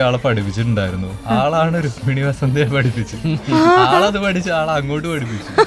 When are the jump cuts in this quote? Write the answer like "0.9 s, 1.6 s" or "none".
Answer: 1.1 s